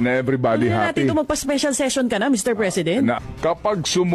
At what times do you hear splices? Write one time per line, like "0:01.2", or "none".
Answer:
0:03.2